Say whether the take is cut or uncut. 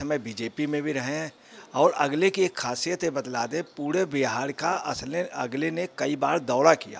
uncut